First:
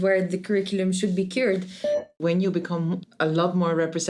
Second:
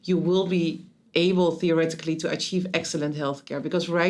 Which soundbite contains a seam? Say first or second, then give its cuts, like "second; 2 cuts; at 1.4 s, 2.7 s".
first; 2 cuts; at 2.2 s, 3.1 s